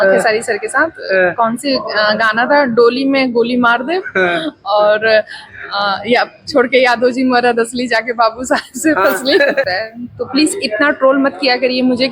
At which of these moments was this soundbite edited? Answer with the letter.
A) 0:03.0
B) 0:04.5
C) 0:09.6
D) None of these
C